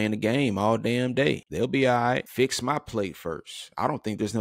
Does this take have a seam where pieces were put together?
yes; 2 cuts; at 1.5 s, 2.3 s

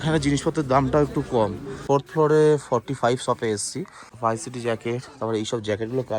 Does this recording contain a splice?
yes; 2 cuts; at 1.8 s, 4.1 s

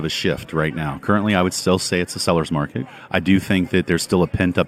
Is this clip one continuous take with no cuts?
no; 1 cut; at 3.0 s

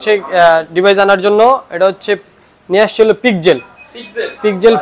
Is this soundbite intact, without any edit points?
yes; 0 cuts

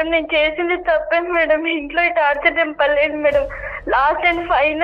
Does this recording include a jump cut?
no; 0 cuts

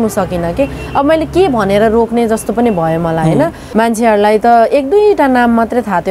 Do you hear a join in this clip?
yes; 1 cut; at 3.6 s

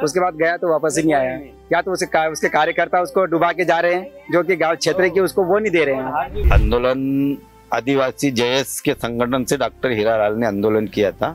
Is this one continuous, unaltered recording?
no; 1 cut; at 6.4 s

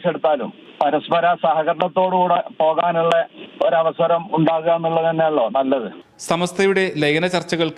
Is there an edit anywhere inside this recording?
no; 0 cuts

